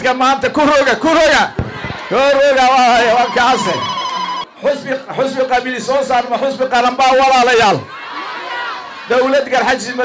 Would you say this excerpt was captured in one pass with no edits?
no; 1 cut; at 4.4 s

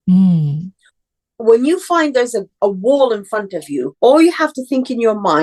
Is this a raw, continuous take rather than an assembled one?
no; 2 cuts; at 2.6 s, 3.9 s

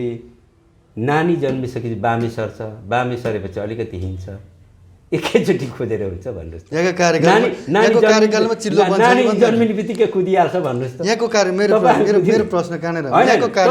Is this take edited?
no; 0 cuts

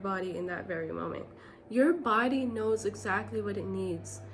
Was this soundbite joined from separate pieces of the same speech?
no; 0 cuts

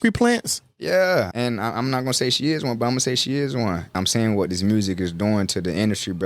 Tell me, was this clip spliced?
yes; 2 cuts; at 1.3 s, 3.9 s

